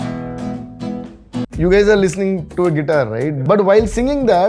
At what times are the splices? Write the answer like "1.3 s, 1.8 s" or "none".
3.3 s

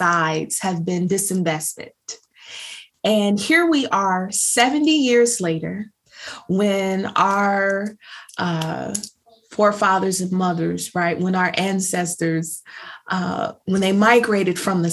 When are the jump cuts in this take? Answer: none

